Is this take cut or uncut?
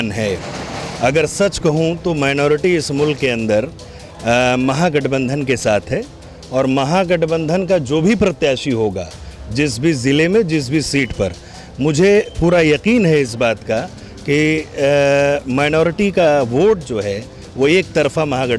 uncut